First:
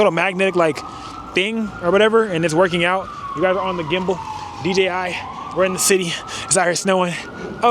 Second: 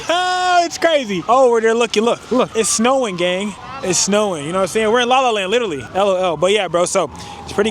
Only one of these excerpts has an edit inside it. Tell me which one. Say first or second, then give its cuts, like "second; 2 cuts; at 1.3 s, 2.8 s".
second; 4 cuts; at 1.2 s, 2.5 s, 3.7 s, 5.8 s